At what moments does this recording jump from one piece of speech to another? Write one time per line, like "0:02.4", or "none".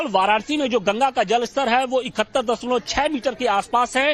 0:02.1

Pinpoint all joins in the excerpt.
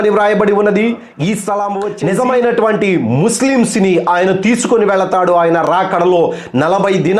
0:01.9

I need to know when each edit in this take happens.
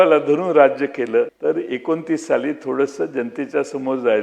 0:01.3

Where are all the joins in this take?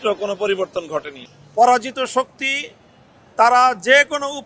0:01.2

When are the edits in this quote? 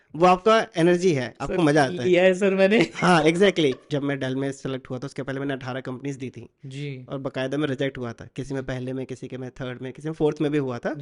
0:03.9

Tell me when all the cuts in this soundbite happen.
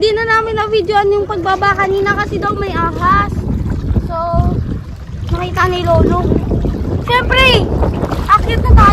none

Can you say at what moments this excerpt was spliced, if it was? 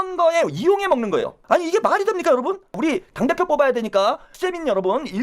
0:01.4
0:02.7
0:04.4

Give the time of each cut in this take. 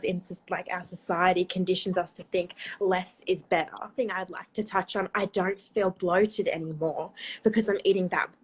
0:03.9

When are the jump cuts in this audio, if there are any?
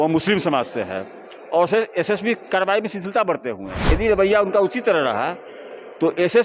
0:03.8

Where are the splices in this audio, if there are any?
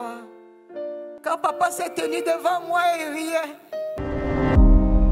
0:01.1

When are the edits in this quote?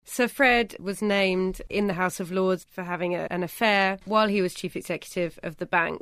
0:00.8
0:01.6
0:03.8

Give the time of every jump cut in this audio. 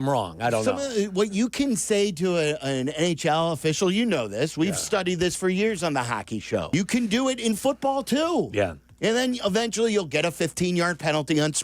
0:06.7

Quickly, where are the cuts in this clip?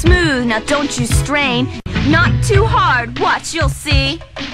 0:01.9

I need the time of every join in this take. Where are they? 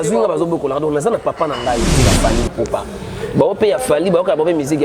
0:01.9

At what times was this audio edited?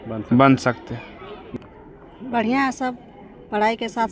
0:01.4

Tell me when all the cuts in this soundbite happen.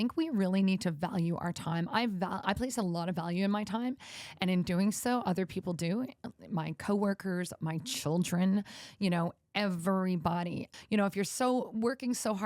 0:10.7

